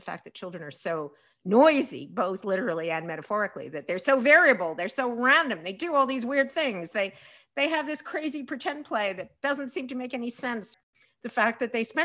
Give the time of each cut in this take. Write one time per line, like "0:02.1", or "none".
0:10.8